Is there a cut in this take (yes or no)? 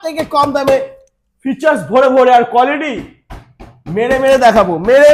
no